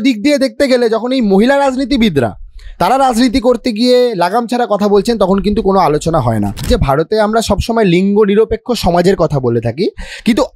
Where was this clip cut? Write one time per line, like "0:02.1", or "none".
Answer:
0:06.7